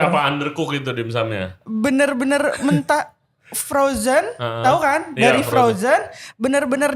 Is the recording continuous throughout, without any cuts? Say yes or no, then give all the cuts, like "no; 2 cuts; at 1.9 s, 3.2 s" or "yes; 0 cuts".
yes; 0 cuts